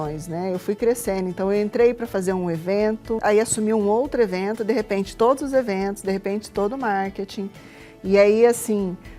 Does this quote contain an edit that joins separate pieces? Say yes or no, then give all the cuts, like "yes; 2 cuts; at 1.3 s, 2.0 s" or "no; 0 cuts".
yes; 1 cut; at 3.2 s